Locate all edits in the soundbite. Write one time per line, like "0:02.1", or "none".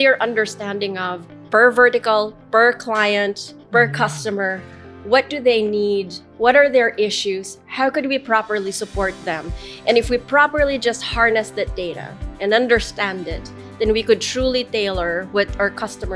none